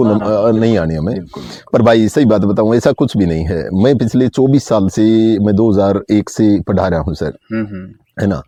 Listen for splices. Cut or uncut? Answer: uncut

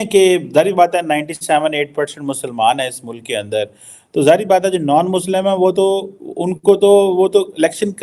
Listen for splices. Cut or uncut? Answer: uncut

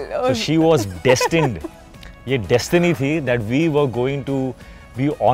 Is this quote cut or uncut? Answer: uncut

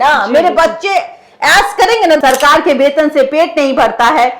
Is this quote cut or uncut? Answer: cut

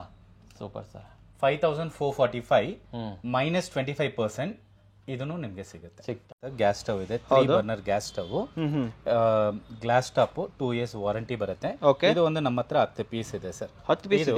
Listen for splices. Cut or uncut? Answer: cut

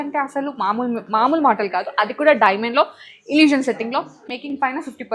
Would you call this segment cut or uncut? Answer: cut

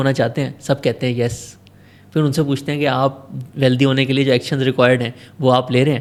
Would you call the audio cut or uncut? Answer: uncut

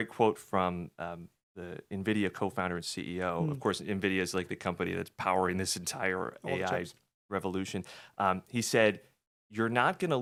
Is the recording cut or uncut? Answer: uncut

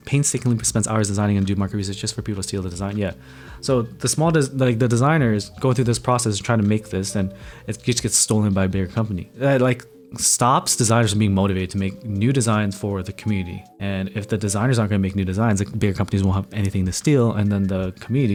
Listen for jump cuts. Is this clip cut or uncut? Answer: uncut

